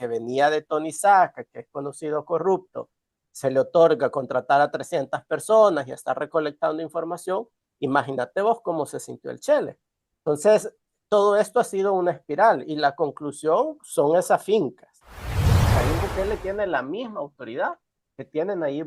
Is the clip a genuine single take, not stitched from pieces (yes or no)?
no